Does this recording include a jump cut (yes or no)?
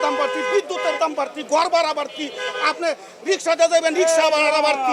no